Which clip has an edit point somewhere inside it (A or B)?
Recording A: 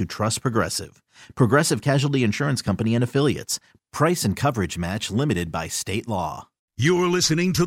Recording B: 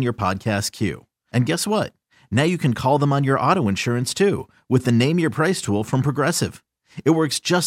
A